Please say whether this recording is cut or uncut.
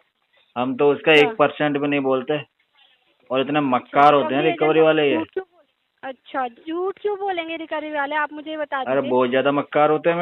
uncut